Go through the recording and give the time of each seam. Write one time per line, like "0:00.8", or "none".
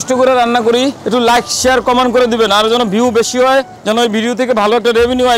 0:01.0
0:03.7